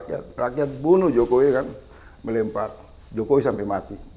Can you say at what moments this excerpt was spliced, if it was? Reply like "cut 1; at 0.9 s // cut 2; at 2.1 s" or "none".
none